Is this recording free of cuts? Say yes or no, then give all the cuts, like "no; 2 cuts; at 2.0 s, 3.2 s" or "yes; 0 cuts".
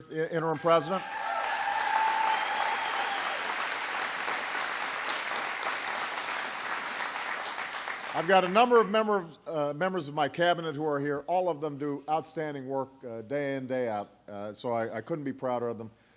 no; 1 cut; at 3.6 s